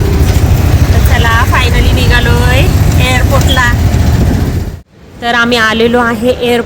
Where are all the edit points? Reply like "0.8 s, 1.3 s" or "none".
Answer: 4.6 s